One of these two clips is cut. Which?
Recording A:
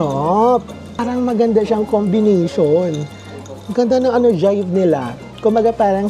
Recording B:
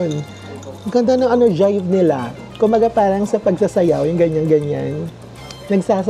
A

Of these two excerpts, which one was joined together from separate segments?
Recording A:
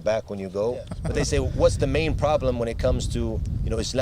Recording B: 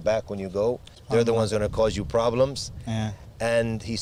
A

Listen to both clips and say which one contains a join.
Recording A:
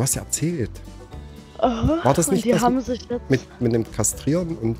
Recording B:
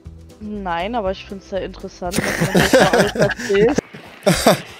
B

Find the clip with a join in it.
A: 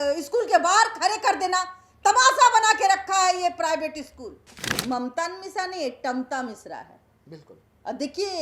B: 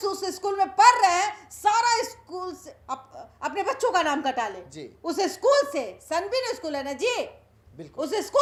A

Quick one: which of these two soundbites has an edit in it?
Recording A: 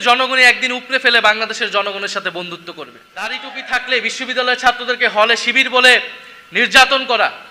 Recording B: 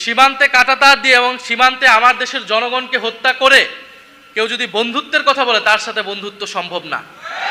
A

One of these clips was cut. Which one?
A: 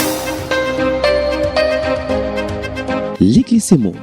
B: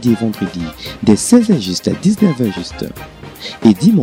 A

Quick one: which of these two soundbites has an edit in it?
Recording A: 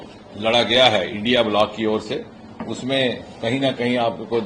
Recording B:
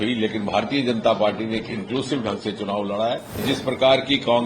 B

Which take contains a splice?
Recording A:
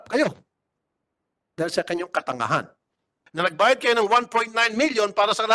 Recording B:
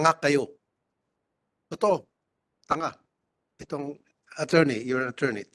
A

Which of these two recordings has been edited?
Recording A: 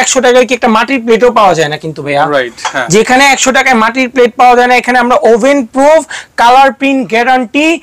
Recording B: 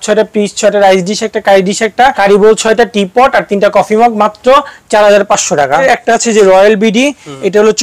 B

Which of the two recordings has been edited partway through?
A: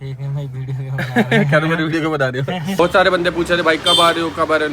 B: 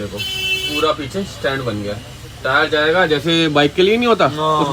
A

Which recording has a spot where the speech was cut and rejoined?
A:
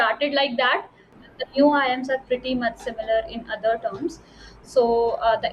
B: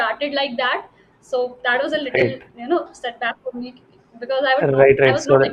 A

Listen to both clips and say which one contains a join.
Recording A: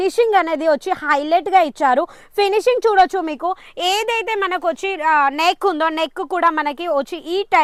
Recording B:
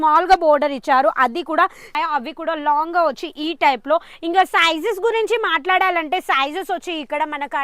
B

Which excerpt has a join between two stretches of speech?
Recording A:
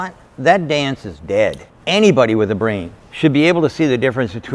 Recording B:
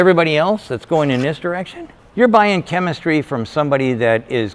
A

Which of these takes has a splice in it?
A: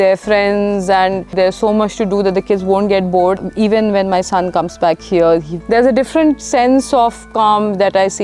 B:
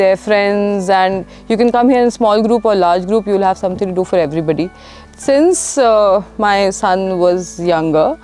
A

